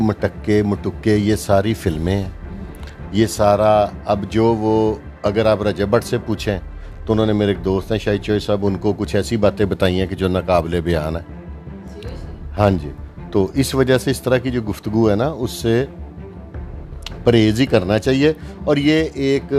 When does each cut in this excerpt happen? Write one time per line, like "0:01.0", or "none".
none